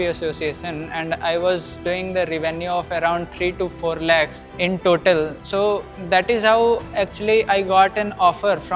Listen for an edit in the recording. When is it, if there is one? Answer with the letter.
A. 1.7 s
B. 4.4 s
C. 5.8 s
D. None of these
D